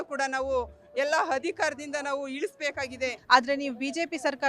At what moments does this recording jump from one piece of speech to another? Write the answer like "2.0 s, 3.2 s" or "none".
3.2 s